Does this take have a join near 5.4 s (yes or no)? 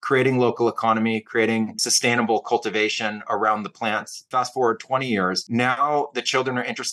yes